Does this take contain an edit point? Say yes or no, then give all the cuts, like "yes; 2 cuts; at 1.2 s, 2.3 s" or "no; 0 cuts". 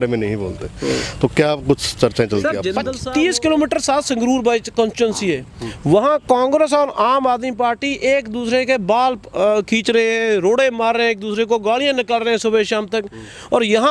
yes; 1 cut; at 2.9 s